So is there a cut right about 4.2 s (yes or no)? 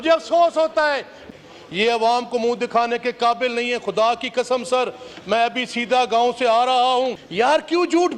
no